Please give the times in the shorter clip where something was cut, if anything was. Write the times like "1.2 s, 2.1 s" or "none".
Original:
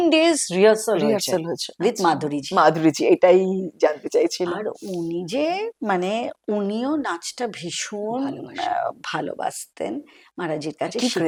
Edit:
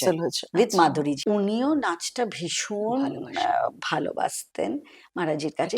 1.2 s